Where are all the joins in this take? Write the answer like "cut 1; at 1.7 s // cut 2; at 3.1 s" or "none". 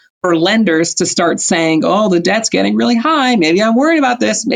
none